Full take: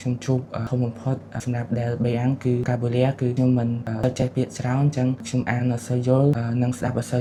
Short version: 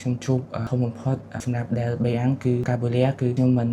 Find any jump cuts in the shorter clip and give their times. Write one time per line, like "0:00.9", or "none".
none